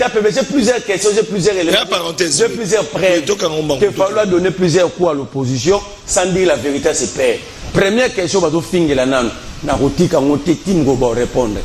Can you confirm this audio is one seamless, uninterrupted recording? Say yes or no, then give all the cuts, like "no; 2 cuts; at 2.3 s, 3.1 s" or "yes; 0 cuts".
yes; 0 cuts